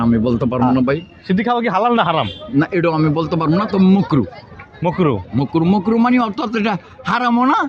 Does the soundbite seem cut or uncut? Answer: uncut